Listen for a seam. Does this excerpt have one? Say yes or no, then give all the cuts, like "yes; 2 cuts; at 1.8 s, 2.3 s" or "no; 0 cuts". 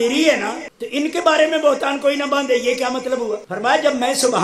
no; 0 cuts